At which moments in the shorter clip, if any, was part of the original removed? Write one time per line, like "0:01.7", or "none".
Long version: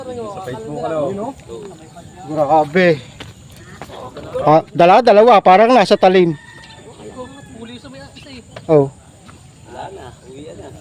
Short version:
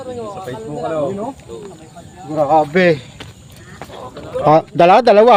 none